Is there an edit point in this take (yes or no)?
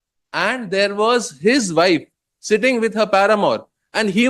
no